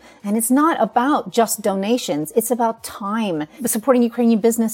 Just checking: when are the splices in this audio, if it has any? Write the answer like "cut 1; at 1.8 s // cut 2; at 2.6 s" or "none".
cut 1; at 3.6 s